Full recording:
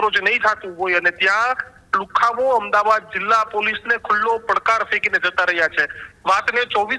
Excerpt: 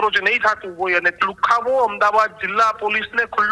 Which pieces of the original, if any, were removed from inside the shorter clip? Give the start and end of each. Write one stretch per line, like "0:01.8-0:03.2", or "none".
0:01.1-0:01.8